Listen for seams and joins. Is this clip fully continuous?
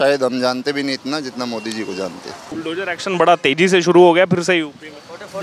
no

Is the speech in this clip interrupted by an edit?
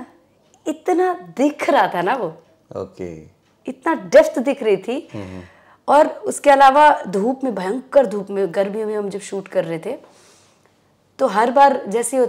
no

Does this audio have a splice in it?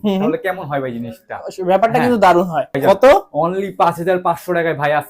yes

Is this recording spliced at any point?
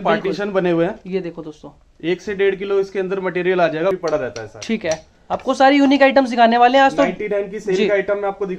yes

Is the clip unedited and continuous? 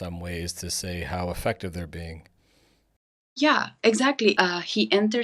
no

